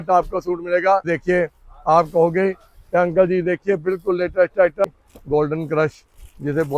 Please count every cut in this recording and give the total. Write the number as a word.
two